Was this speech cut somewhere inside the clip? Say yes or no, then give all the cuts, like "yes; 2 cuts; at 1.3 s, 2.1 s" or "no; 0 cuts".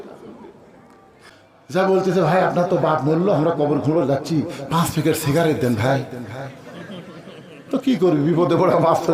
yes; 1 cut; at 1.2 s